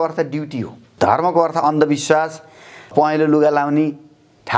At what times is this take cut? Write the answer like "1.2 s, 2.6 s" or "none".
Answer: 0.8 s, 2.9 s